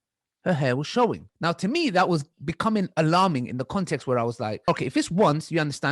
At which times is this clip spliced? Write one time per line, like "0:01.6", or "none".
0:01.3
0:04.7